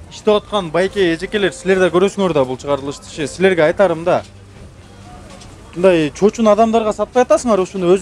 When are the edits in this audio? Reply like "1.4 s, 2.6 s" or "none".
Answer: none